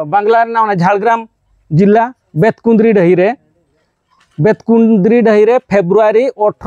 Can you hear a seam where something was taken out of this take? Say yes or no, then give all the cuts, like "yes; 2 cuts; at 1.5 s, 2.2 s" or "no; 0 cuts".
no; 0 cuts